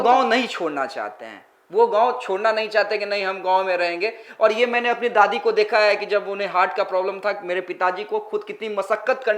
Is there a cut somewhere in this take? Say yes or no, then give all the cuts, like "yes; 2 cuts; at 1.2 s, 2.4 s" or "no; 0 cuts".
no; 0 cuts